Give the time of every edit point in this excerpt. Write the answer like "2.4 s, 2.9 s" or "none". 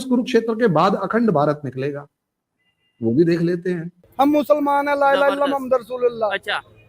4.0 s